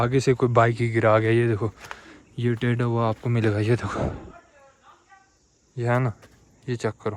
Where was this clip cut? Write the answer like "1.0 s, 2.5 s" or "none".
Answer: none